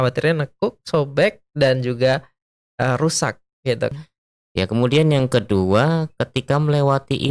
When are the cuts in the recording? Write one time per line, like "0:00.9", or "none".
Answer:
0:03.9